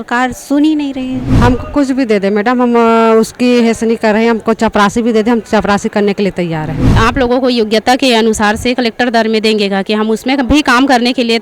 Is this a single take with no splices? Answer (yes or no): no